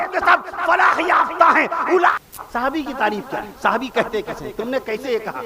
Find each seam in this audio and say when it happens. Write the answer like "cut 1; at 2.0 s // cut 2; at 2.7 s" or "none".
cut 1; at 2.1 s